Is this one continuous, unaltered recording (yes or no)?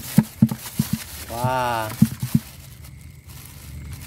yes